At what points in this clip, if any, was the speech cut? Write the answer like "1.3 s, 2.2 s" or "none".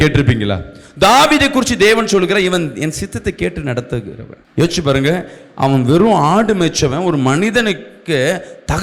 4.5 s